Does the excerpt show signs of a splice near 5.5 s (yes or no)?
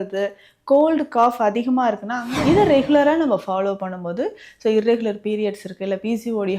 no